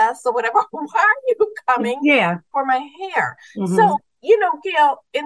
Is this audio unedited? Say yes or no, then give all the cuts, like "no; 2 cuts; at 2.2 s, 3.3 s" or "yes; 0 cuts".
no; 1 cut; at 2.5 s